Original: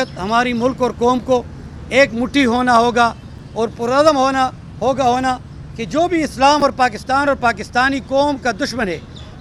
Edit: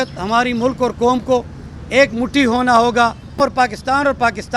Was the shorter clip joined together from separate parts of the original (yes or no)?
yes